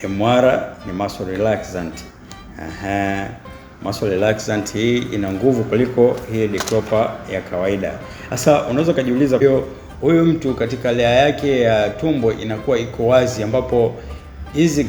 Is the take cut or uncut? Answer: cut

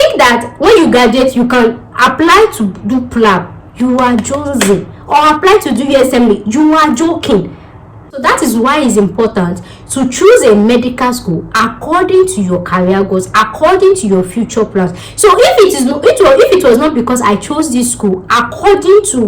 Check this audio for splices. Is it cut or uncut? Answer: cut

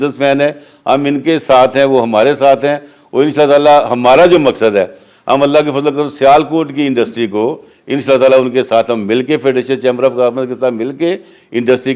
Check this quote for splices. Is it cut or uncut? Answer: uncut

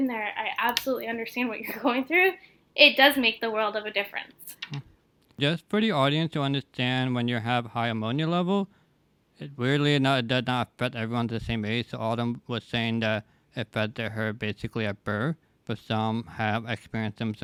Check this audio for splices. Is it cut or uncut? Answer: uncut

